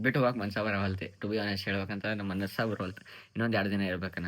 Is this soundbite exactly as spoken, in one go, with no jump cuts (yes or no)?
yes